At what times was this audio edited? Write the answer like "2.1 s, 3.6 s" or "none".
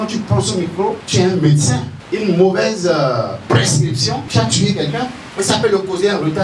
1.0 s, 1.9 s, 4.2 s, 5.2 s